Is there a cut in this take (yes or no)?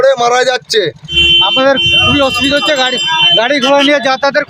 yes